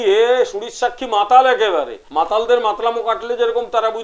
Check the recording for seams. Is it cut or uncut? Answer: cut